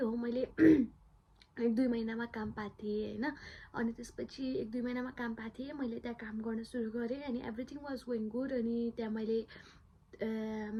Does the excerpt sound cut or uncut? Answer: uncut